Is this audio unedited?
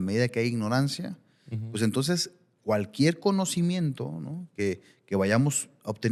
yes; 0 cuts

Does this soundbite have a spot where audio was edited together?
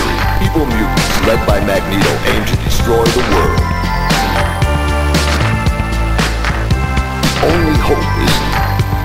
no; 0 cuts

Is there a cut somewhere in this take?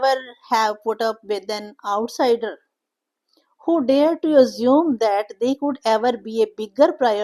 no; 0 cuts

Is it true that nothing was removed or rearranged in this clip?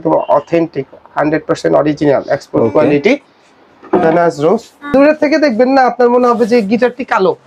no; 1 cut; at 4.9 s

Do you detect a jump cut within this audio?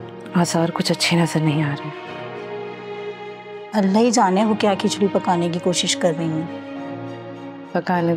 no; 0 cuts

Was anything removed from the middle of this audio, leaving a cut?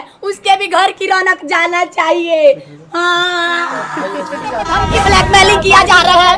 yes; 1 cut; at 4.8 s

